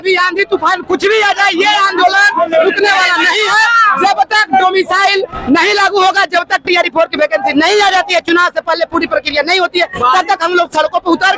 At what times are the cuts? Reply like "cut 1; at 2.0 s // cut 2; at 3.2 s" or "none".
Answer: none